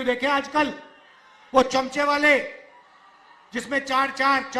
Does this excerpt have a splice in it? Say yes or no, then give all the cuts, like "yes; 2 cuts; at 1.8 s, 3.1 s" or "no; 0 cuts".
no; 0 cuts